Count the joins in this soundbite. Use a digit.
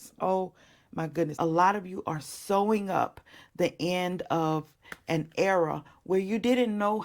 1